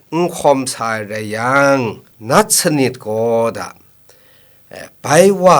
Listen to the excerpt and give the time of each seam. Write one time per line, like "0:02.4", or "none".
0:02.1